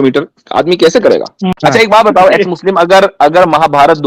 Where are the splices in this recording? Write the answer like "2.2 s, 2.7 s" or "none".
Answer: 1.6 s